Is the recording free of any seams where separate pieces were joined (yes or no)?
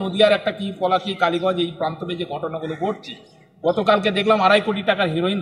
yes